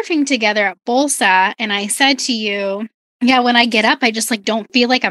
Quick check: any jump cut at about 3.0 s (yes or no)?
yes